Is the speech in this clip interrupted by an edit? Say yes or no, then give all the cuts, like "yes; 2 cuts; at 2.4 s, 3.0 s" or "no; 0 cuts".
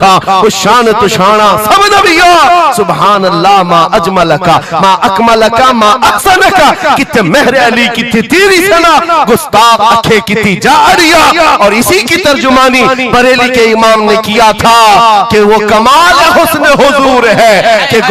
no; 0 cuts